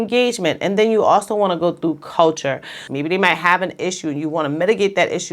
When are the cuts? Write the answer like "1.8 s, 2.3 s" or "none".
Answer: 2.8 s